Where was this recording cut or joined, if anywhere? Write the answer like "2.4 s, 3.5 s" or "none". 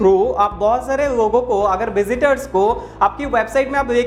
none

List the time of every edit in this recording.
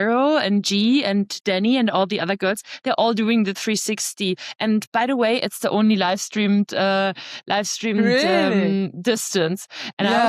none

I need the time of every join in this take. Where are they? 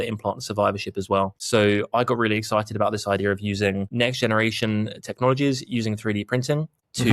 none

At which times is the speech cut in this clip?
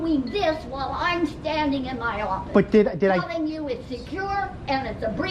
none

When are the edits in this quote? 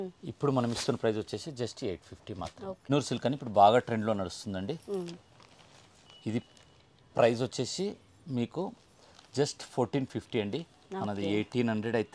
2.9 s

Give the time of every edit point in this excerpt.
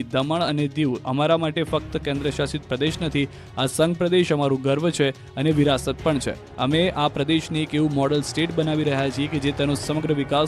9.4 s

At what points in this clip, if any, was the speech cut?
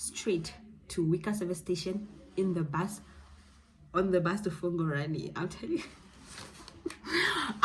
none

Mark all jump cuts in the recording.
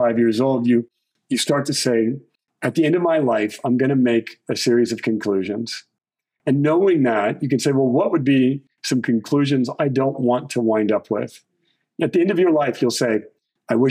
none

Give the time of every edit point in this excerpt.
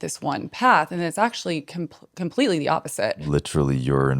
3.2 s

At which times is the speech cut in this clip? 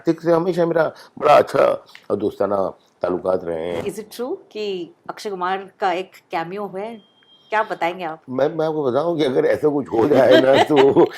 3.8 s

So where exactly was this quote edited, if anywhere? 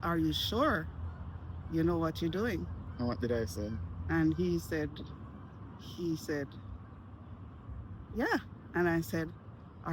none

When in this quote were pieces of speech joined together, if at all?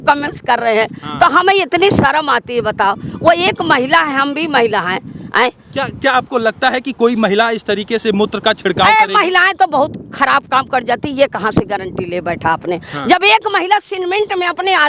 none

